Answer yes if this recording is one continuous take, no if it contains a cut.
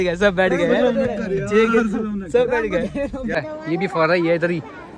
no